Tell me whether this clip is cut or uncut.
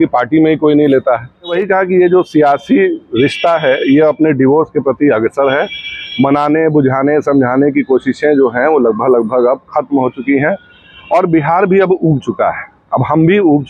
cut